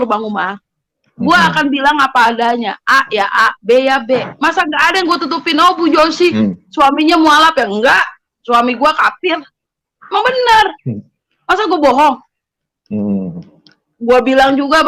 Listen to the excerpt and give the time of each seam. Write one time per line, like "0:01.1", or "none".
none